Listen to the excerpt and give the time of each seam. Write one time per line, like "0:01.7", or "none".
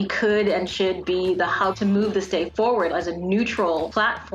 0:01.7